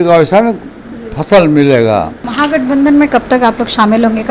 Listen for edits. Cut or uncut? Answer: cut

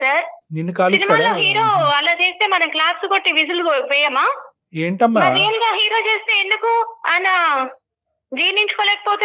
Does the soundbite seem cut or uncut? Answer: uncut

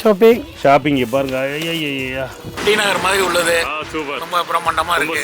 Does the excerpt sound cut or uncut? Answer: cut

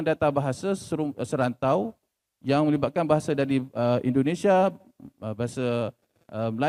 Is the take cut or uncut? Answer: uncut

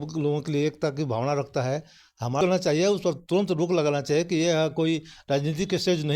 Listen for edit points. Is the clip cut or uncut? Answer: cut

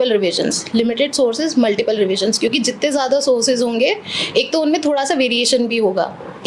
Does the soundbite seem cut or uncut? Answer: uncut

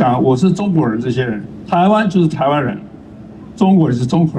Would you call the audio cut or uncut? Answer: cut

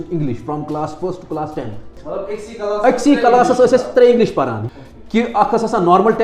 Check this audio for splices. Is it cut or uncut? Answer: cut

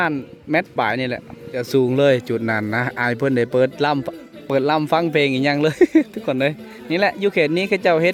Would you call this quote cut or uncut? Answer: uncut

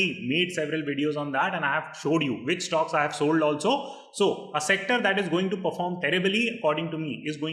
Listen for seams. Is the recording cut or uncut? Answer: uncut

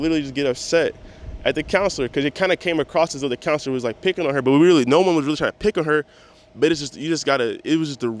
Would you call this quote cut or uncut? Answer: uncut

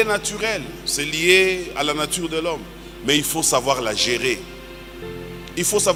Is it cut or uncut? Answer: uncut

